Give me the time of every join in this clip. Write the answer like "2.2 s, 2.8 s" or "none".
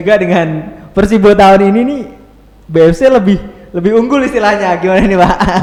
none